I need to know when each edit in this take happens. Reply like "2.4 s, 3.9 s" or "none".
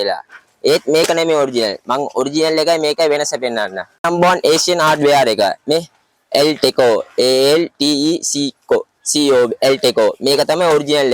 none